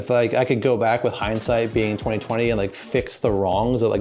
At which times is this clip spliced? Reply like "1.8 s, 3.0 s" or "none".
none